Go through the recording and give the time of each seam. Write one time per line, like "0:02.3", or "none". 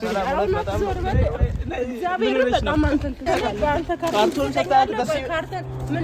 0:03.2